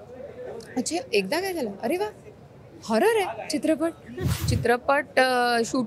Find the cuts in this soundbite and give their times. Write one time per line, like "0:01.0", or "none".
0:04.2